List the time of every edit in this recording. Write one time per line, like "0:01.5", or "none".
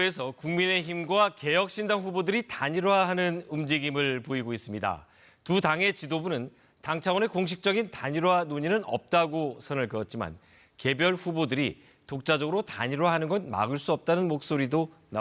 none